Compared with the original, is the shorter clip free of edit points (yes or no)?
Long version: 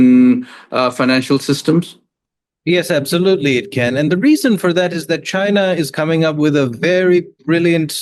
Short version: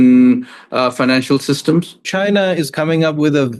no